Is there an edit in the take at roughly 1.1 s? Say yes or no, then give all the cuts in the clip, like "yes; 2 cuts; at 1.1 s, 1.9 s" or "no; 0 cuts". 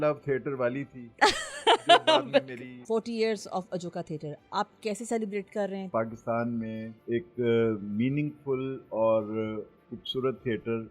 no; 3 cuts; at 2.7 s, 5.9 s, 6.9 s